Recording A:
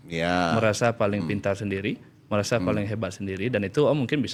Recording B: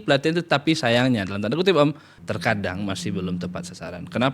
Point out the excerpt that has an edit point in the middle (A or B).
B